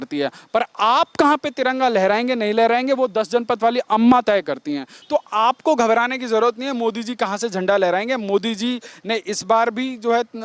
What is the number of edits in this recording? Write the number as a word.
one